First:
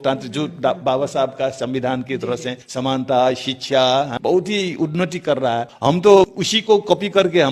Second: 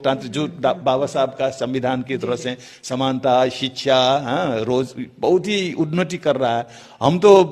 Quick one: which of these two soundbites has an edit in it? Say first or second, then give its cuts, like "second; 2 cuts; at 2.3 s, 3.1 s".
first; 4 cuts; at 2.6 s, 4.1 s, 5.8 s, 6.5 s